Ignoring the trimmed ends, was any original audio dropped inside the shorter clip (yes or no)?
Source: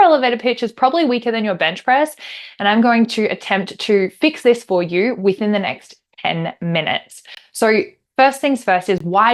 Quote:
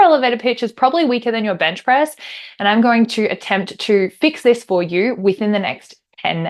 no